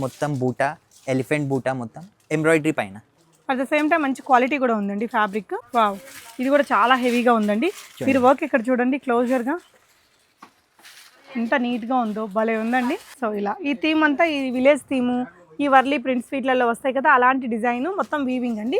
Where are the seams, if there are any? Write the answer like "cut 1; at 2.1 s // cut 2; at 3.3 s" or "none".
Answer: cut 1; at 5.6 s // cut 2; at 13.1 s